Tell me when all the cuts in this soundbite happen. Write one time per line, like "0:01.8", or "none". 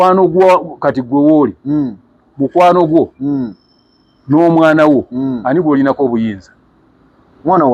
none